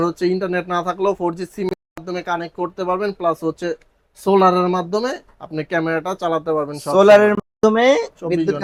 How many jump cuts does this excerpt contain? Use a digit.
0